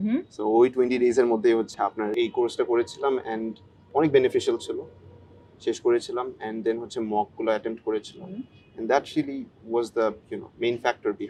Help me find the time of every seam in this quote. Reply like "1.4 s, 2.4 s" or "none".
none

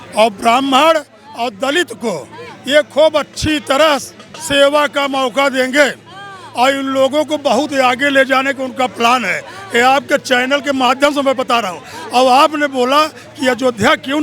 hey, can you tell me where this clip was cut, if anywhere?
none

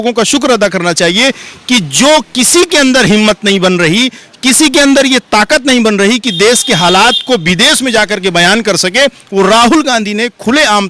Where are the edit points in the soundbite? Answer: none

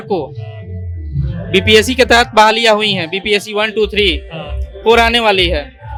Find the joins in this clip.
none

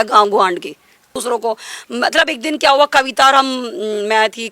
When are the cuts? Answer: 1.2 s

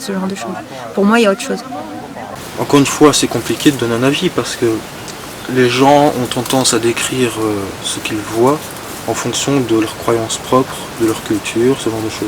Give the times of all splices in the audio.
none

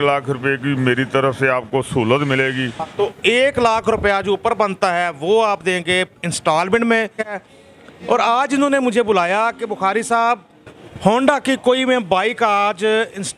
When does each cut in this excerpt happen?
2.9 s, 7.5 s, 10.4 s

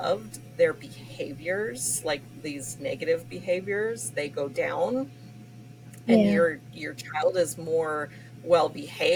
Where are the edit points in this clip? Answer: none

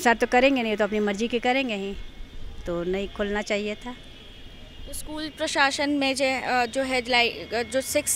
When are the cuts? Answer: none

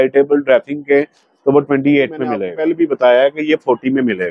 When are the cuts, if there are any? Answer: 2.5 s

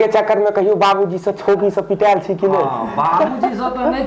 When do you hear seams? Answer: none

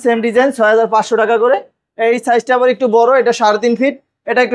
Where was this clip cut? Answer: none

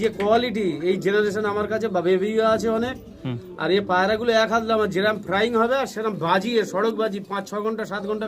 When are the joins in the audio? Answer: none

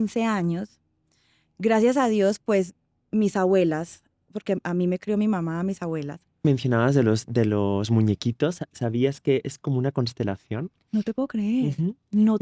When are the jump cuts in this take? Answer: 6.4 s

